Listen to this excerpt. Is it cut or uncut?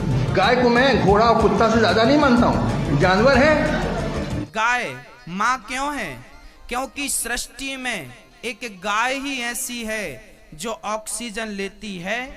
cut